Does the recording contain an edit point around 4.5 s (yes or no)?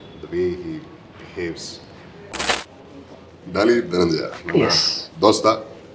no